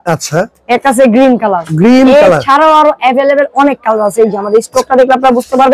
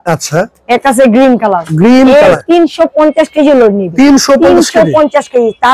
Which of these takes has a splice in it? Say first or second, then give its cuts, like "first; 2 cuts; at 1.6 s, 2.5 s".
second; 1 cut; at 2.4 s